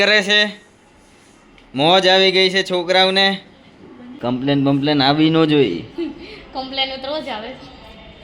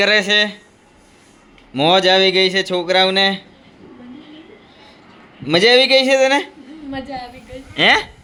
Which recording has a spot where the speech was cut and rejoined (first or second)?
first